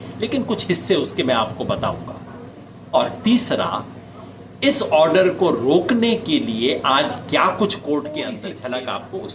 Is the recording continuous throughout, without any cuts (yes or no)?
no